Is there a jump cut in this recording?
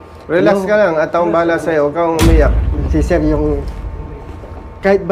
no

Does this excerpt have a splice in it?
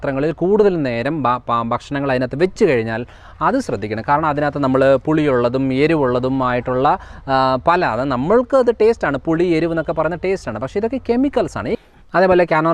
yes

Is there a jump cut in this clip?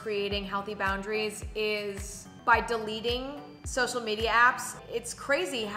yes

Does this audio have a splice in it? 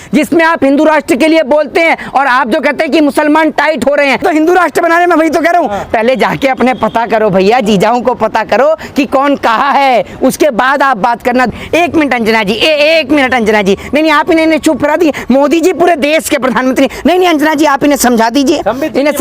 yes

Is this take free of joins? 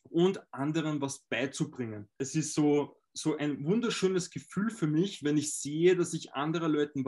no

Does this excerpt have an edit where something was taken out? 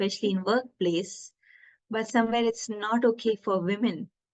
no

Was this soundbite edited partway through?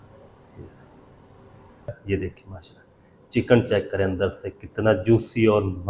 yes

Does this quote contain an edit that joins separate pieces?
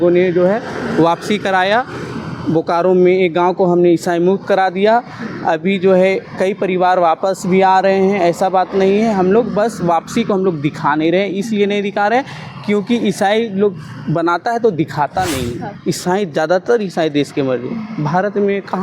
yes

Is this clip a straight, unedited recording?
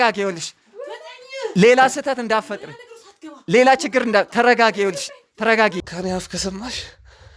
no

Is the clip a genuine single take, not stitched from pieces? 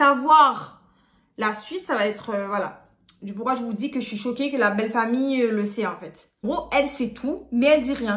no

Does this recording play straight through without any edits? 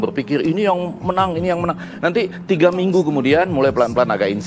yes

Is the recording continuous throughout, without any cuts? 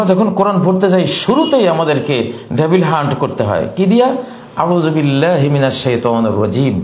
yes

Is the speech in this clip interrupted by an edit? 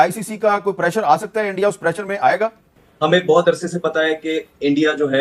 no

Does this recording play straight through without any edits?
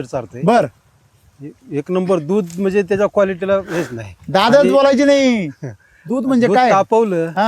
yes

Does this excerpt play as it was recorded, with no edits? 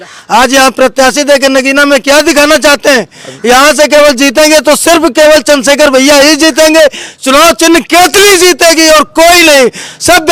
yes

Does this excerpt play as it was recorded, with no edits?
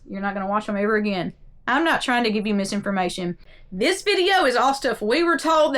no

